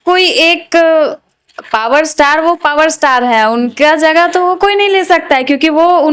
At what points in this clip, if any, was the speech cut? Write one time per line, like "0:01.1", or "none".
none